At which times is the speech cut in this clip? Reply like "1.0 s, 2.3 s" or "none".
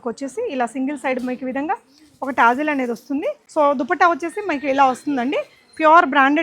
3.4 s